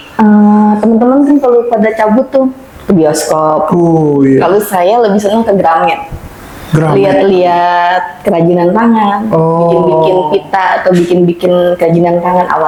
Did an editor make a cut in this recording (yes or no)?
no